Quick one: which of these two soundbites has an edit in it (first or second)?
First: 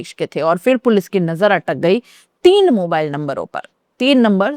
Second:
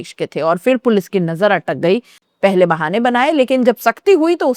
second